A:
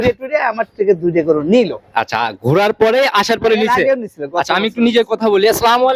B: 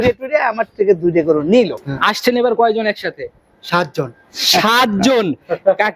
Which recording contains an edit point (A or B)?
B